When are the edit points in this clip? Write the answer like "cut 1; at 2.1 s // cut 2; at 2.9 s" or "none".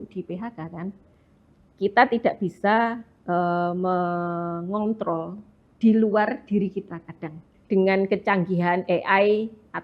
cut 1; at 1.1 s // cut 2; at 7.5 s